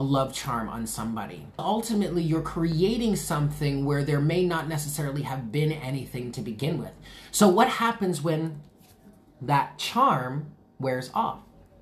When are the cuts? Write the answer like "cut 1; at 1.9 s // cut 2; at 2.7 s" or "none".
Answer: cut 1; at 1.6 s